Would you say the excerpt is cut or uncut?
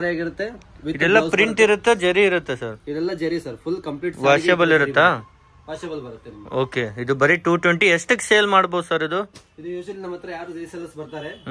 uncut